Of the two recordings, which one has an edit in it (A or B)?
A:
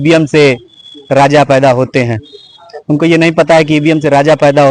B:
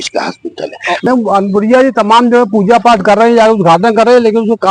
B